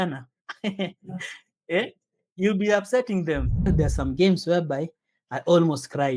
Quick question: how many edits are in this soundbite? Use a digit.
1